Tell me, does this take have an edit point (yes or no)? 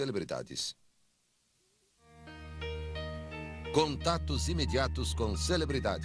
yes